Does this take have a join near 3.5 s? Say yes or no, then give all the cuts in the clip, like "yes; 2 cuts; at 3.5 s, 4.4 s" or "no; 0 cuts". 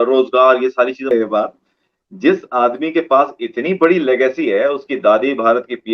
no; 1 cut; at 1.1 s